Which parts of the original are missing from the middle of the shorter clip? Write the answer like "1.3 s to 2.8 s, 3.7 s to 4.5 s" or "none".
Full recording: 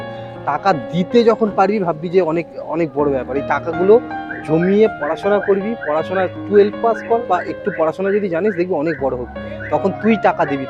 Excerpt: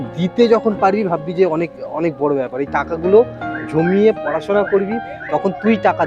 5.8 s to 9.4 s